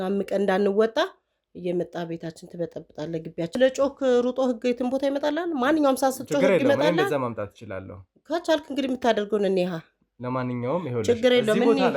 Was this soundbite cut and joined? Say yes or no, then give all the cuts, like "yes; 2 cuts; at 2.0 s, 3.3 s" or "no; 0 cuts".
yes; 1 cut; at 3.5 s